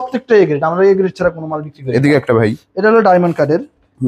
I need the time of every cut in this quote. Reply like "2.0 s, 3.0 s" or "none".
none